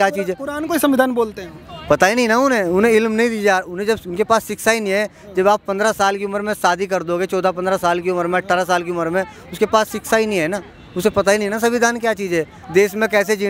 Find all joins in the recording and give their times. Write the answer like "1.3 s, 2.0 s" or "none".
none